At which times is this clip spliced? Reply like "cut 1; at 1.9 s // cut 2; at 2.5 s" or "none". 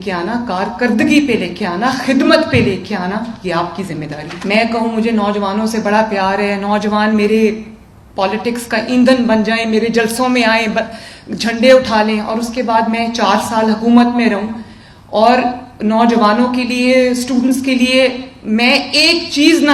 cut 1; at 4.3 s